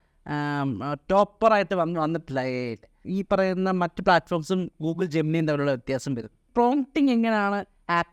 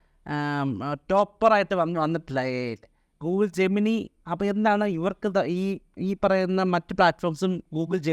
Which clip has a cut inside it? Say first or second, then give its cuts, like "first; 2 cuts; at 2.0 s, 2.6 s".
first; 2 cuts; at 3.0 s, 6.5 s